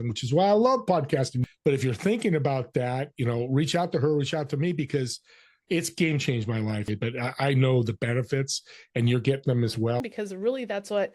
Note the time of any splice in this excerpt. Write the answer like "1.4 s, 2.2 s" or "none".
1.4 s, 6.9 s, 10.0 s

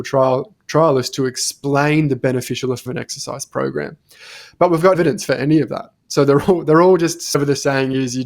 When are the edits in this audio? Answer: 5.0 s, 7.3 s

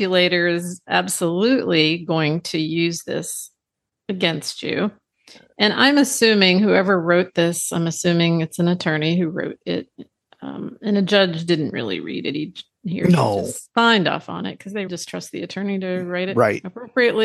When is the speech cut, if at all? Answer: 14.9 s

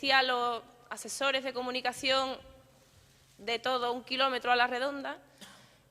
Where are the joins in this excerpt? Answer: 3.8 s

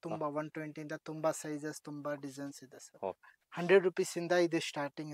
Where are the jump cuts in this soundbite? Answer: none

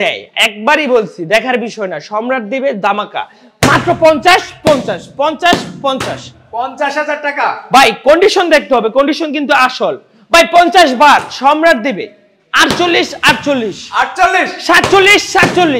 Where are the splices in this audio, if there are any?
none

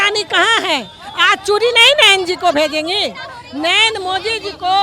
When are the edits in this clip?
none

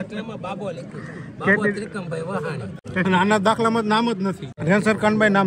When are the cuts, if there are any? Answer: 2.8 s, 4.5 s

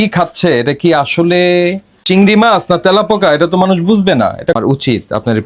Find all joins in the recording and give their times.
1.9 s, 4.6 s

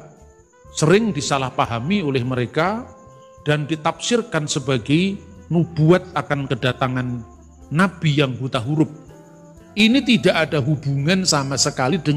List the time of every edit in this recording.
9.6 s

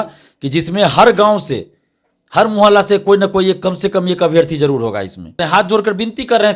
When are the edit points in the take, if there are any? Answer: 5.4 s

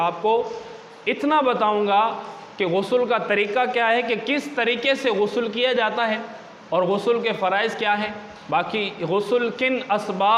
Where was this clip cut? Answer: none

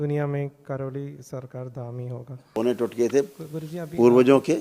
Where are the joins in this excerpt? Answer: 2.4 s

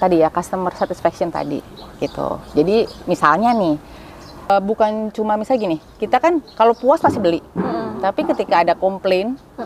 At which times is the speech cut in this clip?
4.5 s

